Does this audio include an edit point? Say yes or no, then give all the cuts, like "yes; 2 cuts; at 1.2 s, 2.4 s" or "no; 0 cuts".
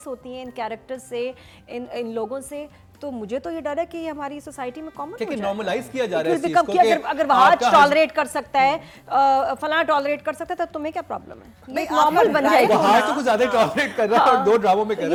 no; 0 cuts